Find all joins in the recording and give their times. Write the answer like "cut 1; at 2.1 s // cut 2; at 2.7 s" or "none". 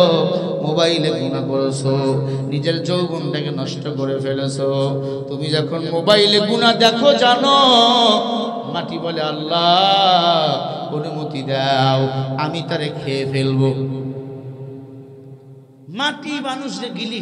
none